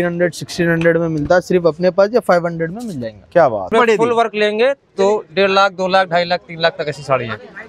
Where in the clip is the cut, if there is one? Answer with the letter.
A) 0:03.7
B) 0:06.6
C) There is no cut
A